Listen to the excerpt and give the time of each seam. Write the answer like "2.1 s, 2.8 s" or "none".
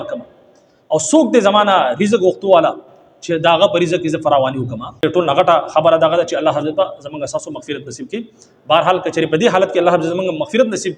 5.0 s